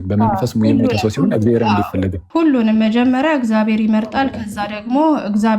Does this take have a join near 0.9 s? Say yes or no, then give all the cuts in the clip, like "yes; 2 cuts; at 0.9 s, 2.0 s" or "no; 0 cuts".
no; 1 cut; at 2.2 s